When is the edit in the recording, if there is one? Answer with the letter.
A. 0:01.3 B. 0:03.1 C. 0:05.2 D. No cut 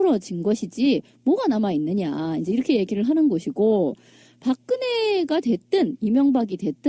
C